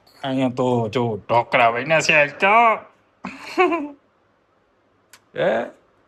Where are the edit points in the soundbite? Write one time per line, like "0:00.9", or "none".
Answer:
none